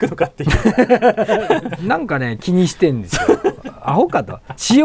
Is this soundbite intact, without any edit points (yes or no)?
no